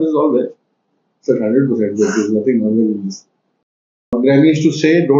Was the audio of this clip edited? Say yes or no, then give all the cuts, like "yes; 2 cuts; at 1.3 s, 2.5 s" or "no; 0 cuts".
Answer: yes; 1 cut; at 4.1 s